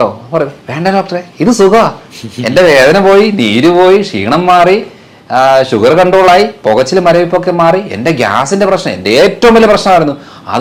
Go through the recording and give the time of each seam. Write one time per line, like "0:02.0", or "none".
none